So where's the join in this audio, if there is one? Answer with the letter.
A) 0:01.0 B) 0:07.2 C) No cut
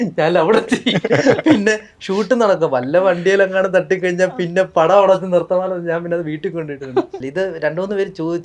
B